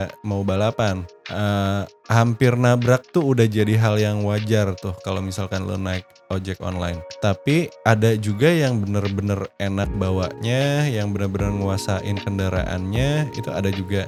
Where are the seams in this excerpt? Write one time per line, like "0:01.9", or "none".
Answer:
none